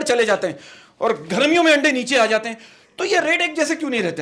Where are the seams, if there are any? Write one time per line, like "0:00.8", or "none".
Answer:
none

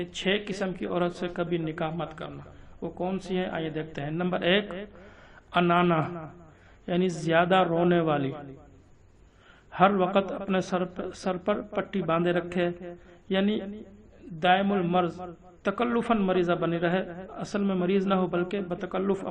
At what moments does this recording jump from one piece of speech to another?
none

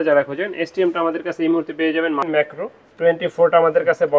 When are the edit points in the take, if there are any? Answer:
0:02.3

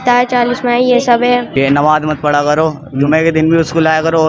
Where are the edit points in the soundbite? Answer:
0:01.5

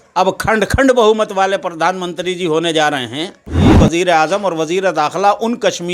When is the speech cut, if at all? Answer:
0:03.7

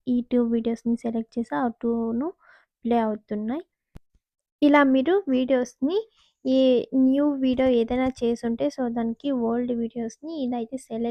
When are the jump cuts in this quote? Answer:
none

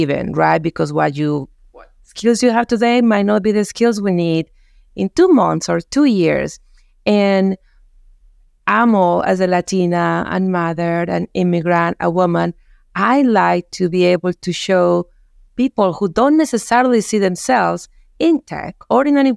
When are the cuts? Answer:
none

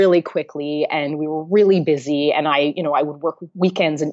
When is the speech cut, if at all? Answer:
none

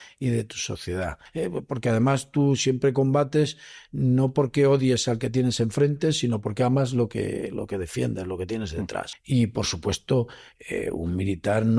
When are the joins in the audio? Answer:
0:01.2
0:09.1

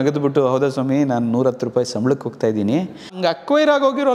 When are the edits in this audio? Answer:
0:03.1

